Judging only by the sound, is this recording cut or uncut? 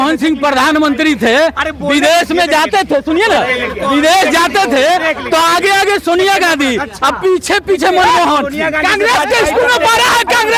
uncut